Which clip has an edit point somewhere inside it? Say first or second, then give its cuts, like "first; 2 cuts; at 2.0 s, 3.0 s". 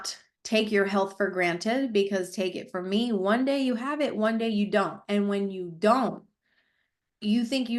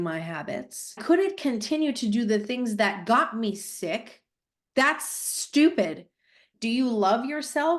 second; 2 cuts; at 1.0 s, 6.5 s